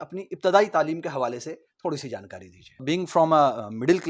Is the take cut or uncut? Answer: cut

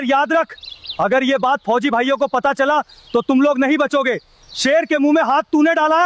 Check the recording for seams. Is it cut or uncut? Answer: uncut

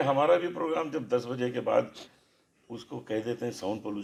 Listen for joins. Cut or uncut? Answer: uncut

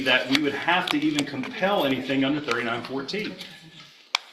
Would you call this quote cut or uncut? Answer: uncut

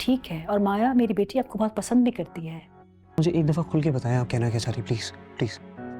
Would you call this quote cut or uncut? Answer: cut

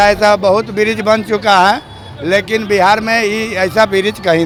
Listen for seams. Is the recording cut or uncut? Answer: uncut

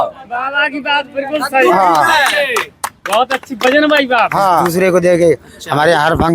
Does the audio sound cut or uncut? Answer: cut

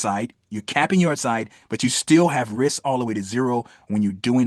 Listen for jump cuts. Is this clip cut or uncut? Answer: uncut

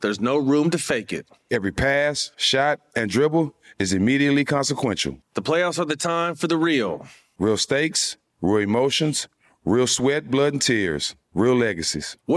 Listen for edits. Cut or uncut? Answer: uncut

